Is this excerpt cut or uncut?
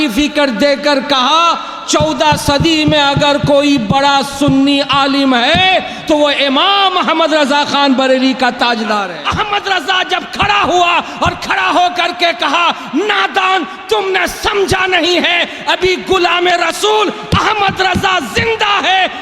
cut